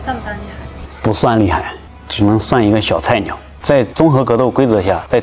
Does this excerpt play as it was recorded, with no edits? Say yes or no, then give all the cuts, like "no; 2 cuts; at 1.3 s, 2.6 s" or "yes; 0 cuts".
yes; 0 cuts